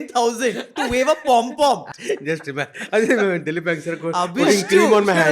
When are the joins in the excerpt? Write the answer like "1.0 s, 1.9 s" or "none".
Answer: 1.9 s